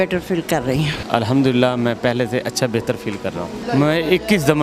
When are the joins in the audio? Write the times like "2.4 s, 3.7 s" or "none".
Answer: 1.0 s, 3.6 s

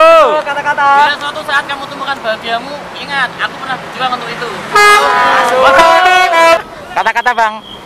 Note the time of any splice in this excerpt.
6.6 s

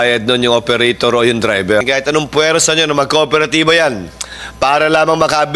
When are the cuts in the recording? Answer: 1.8 s

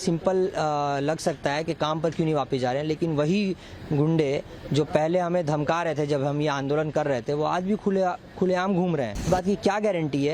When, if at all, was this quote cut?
9.3 s

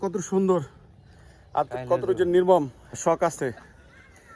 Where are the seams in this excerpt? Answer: 3.0 s

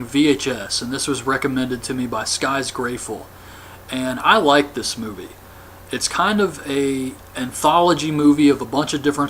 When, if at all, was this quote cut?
none

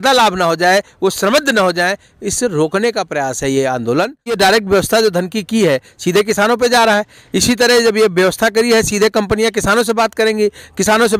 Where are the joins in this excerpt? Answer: 4.3 s

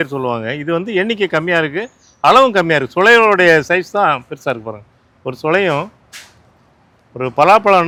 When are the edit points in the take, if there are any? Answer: none

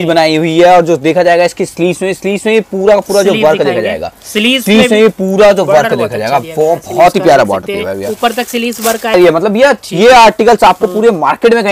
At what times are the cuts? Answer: 9.1 s

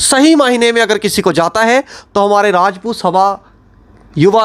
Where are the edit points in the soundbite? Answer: none

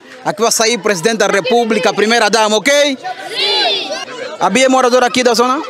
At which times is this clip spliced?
3.9 s

